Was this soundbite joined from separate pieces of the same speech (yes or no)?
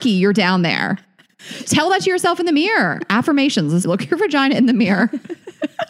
yes